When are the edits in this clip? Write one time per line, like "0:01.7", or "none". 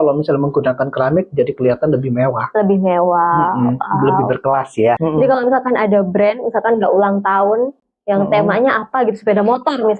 0:05.0

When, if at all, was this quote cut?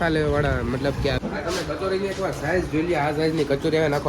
0:01.2

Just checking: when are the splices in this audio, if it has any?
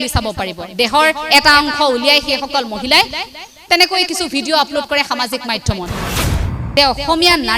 0:06.1

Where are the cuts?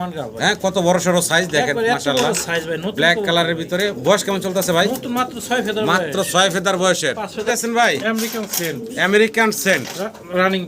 0:07.4

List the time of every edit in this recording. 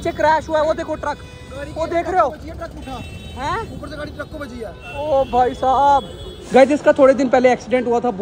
0:04.8
0:06.5

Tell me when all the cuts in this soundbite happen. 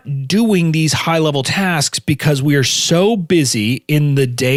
none

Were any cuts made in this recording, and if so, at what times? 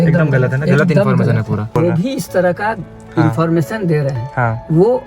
0:01.7

